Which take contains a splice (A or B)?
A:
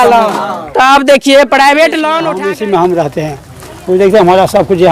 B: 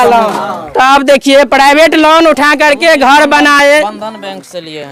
A